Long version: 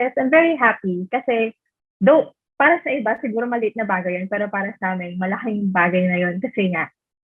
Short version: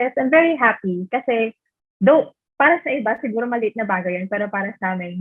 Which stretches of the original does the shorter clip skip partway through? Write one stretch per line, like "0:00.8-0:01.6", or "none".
none